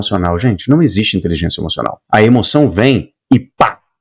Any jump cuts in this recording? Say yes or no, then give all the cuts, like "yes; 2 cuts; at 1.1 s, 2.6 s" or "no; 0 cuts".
yes; 1 cut; at 2.0 s